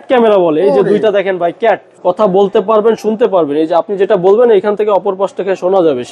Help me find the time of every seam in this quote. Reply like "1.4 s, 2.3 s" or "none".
1.9 s